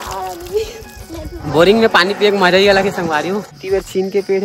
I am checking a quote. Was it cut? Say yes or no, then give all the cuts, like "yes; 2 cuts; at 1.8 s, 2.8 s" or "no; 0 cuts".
yes; 2 cuts; at 1.4 s, 3.5 s